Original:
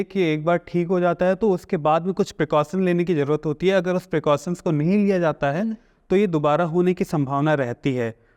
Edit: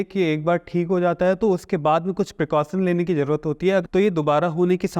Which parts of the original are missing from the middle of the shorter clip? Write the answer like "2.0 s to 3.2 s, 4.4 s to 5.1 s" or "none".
3.9 s to 6.0 s